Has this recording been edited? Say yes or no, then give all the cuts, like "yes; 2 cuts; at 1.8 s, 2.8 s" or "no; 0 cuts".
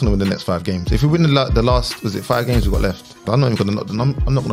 yes; 1 cut; at 3.3 s